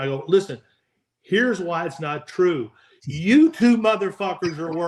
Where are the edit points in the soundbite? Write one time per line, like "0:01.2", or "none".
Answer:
none